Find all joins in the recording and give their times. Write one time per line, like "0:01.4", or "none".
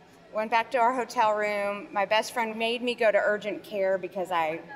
0:02.5